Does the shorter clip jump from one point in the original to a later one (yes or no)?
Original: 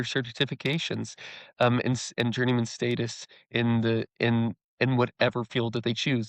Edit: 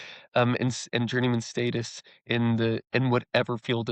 yes